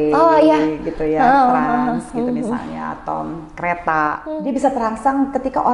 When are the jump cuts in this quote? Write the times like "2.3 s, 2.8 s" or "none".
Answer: 4.2 s

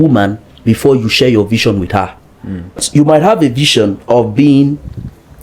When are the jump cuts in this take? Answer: 2.8 s

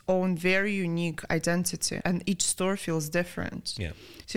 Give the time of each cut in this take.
2.0 s

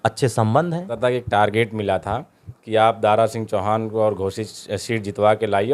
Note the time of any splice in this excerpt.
0.9 s

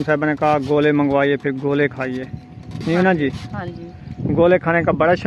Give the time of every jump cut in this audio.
none

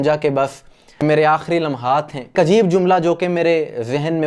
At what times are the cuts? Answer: 2.3 s

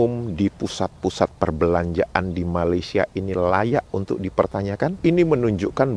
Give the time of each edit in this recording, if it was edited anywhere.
5.0 s

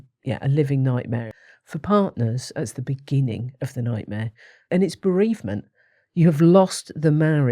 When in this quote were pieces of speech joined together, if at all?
1.3 s, 4.7 s

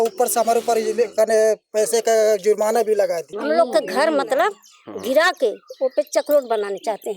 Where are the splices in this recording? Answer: 3.3 s

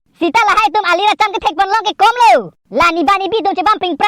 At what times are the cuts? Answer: none

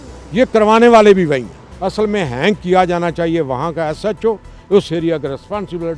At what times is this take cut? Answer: 1.6 s

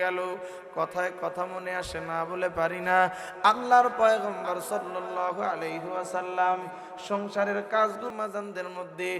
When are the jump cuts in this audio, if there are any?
8.1 s

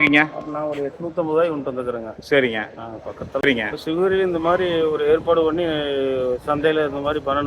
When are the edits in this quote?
3.5 s

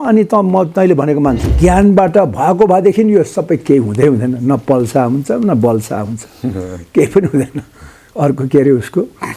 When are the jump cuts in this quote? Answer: 1.5 s

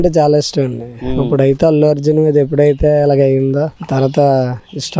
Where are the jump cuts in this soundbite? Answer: 3.8 s

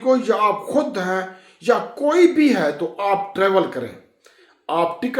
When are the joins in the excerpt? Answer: none

